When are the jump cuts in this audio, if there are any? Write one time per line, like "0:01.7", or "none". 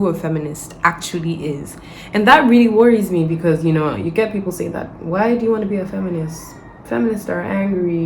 none